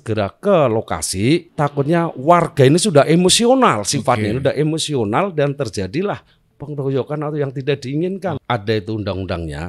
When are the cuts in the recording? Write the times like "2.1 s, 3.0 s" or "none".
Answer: 1.5 s, 8.4 s